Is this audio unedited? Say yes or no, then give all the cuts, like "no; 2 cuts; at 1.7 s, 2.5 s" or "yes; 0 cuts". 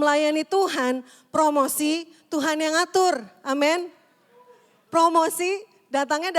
yes; 0 cuts